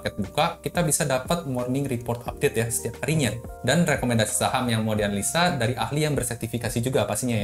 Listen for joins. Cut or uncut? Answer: cut